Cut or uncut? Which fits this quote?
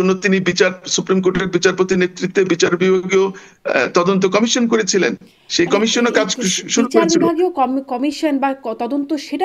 uncut